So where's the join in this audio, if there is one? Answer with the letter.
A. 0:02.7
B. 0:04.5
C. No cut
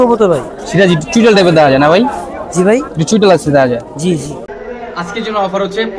B